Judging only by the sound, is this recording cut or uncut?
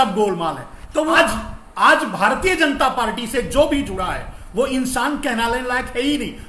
cut